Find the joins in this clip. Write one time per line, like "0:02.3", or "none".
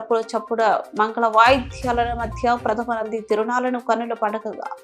none

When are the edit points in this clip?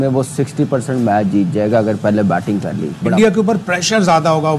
0:03.0

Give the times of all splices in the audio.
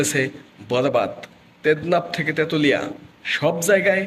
none

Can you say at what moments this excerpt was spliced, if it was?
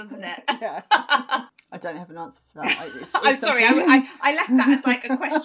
0:01.5

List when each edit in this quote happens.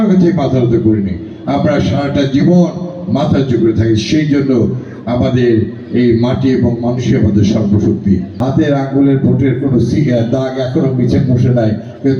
0:08.3

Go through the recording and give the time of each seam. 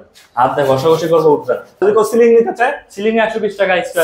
0:01.8

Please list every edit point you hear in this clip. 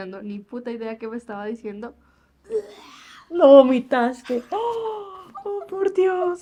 none

